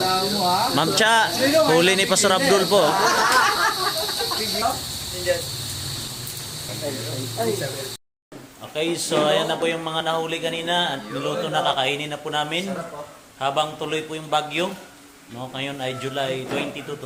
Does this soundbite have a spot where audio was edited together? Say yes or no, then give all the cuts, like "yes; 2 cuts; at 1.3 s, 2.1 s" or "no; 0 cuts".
no; 0 cuts